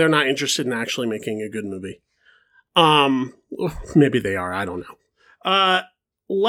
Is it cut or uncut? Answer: uncut